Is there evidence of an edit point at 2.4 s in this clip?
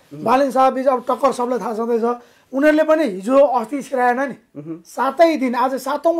no; 0 cuts

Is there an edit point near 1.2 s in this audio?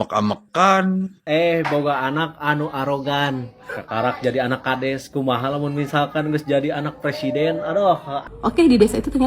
yes; 2 cuts; at 1.2 s, 8.3 s

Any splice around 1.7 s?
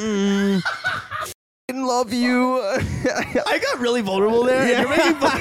yes; 2 cuts; at 1.7 s, 3.4 s

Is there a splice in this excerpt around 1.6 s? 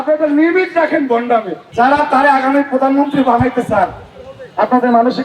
yes; 1 cut; at 1.6 s

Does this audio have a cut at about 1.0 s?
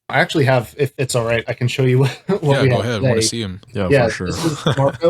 yes; 1 cut; at 1.0 s

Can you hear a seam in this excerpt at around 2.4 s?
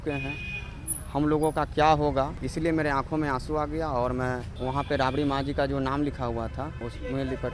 yes; 3 cuts; at 2.4 s, 4.5 s, 6.8 s

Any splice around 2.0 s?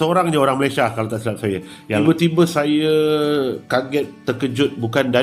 yes; 1 cut; at 2.0 s

